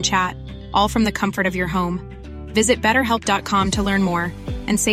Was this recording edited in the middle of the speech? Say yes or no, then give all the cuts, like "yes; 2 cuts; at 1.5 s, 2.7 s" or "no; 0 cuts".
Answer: no; 0 cuts